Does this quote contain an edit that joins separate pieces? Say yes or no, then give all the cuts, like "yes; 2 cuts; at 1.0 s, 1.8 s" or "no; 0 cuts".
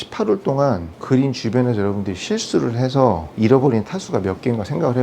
yes; 2 cuts; at 0.9 s, 3.3 s